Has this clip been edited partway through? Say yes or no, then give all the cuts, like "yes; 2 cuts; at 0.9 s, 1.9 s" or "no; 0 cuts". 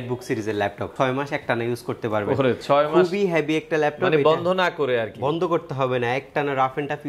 yes; 1 cut; at 0.9 s